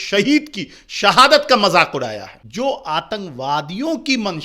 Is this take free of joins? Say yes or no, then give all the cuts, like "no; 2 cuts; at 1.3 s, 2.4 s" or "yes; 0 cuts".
no; 1 cut; at 2.4 s